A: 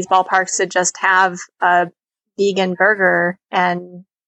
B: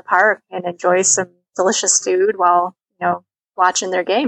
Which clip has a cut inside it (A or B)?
B